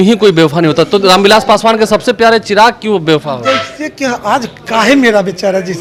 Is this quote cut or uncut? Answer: uncut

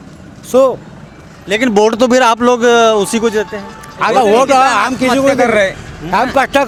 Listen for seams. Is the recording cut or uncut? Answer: uncut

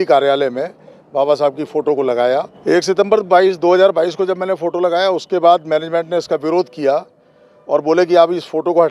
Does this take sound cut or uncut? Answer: cut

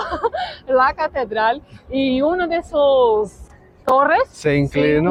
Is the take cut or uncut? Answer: uncut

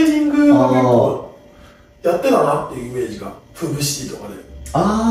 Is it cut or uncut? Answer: uncut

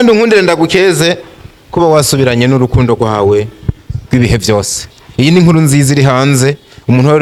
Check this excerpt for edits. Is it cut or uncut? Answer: uncut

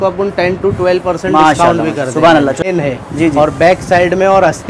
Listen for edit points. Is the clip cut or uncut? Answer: cut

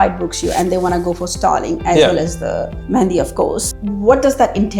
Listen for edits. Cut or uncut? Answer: cut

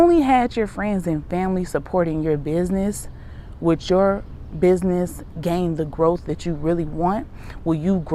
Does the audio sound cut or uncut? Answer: uncut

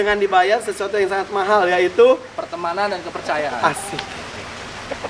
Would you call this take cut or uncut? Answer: uncut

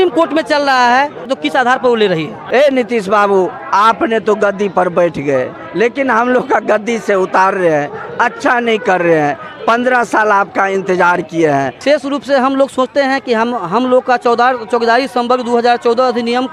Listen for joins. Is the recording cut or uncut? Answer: cut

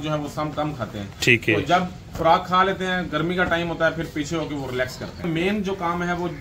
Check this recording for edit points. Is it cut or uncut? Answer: cut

